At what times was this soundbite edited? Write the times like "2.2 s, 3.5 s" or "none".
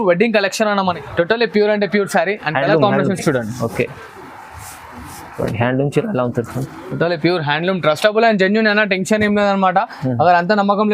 1.0 s

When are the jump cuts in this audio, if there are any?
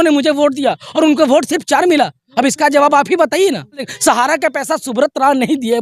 3.9 s

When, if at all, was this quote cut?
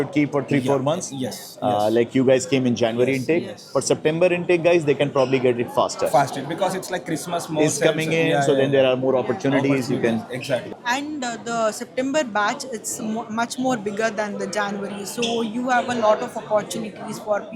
none

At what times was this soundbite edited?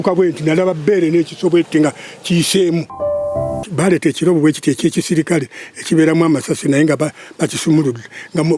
3.1 s

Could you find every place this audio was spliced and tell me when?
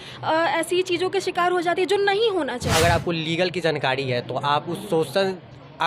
2.7 s

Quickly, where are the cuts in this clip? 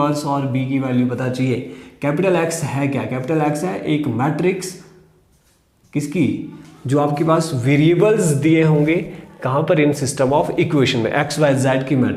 none

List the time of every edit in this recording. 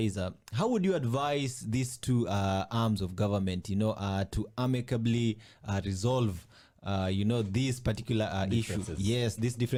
none

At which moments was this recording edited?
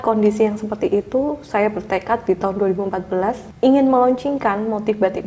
3.5 s

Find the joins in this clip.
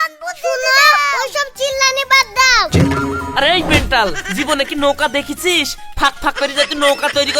2.7 s

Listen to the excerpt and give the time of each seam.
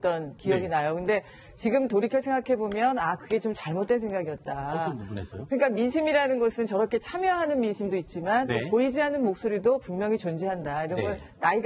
none

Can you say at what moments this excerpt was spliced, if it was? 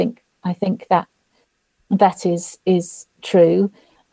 none

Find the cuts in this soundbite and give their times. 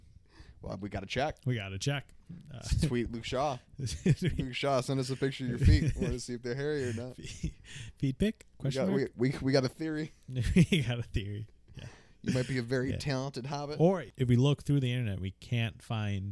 14.1 s

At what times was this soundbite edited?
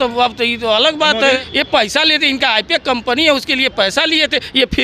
1.4 s

